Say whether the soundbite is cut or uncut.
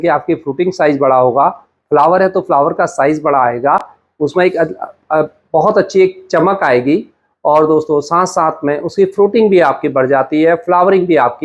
uncut